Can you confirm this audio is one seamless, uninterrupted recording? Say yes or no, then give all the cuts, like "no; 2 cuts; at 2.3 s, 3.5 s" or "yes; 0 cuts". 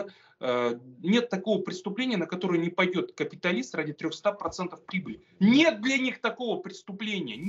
yes; 0 cuts